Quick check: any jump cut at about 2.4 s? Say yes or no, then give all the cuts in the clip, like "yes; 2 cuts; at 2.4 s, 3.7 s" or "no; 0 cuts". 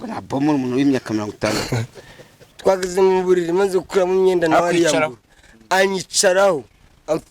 yes; 1 cut; at 2.4 s